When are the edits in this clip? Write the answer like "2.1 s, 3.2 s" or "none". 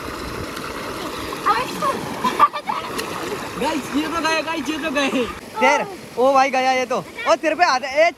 5.4 s